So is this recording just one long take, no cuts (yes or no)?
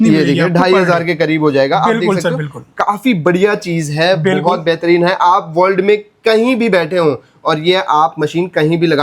yes